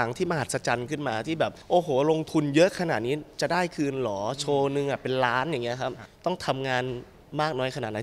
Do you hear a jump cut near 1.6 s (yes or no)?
yes